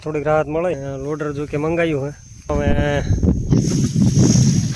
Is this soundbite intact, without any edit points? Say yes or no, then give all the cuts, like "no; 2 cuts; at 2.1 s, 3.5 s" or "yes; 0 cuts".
no; 2 cuts; at 0.8 s, 2.5 s